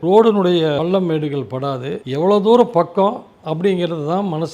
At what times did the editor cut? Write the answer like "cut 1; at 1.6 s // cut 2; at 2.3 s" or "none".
cut 1; at 0.8 s // cut 2; at 2.0 s